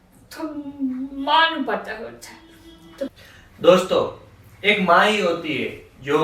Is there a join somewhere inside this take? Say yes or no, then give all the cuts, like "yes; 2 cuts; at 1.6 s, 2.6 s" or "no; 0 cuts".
yes; 1 cut; at 3.1 s